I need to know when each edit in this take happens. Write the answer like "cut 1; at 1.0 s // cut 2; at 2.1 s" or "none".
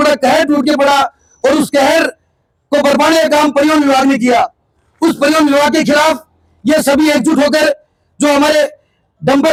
none